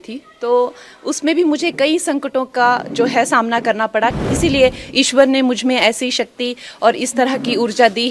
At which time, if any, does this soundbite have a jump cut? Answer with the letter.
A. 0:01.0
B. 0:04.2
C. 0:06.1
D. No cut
B